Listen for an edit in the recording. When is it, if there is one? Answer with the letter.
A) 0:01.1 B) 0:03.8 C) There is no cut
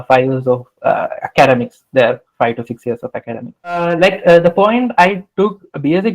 B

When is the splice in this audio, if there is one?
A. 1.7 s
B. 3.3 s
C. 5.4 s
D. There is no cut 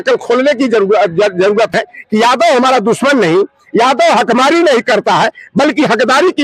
A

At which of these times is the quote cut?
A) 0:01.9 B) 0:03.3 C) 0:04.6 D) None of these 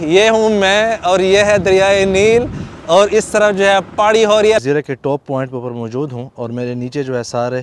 C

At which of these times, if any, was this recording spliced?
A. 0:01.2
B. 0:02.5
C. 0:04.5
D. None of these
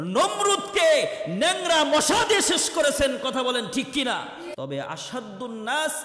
C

